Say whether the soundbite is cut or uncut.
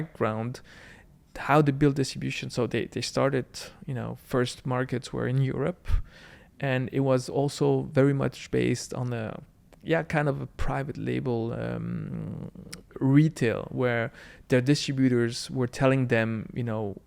uncut